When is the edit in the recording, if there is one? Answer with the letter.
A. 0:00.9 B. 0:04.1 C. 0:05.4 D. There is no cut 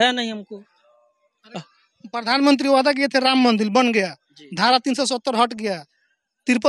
D